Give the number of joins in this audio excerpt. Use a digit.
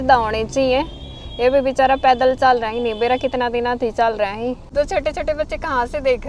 1